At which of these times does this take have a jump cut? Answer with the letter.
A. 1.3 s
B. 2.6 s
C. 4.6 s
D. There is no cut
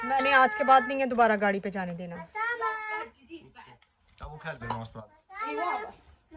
D